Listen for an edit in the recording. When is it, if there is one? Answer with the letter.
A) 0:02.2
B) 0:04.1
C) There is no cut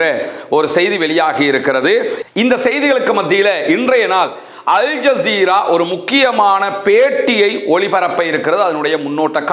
A